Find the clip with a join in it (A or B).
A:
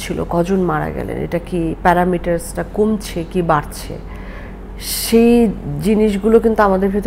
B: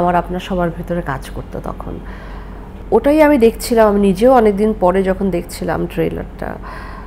B